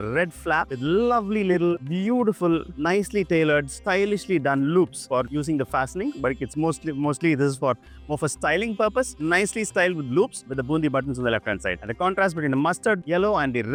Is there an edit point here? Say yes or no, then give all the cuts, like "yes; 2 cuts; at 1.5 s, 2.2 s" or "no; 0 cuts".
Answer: no; 0 cuts